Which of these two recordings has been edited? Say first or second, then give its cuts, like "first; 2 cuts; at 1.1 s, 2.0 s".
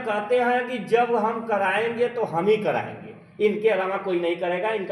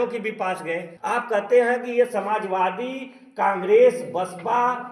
second; 1 cut; at 0.9 s